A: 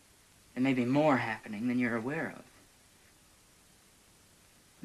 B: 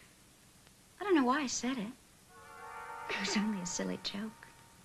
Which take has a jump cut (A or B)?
B